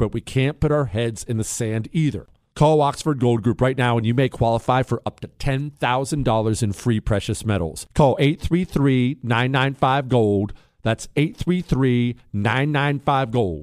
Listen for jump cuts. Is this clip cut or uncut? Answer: cut